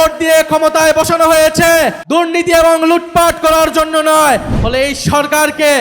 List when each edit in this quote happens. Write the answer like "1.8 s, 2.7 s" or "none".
2.0 s, 4.5 s